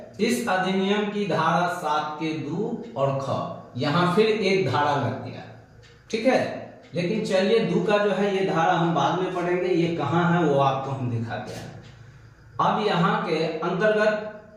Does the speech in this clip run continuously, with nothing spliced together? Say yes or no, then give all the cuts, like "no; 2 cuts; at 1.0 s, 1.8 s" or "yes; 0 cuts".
yes; 0 cuts